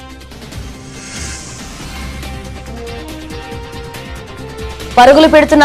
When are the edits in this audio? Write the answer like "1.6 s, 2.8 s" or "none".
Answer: 0.9 s, 2.0 s